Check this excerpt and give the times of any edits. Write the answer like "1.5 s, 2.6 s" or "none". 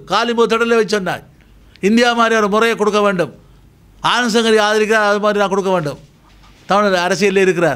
none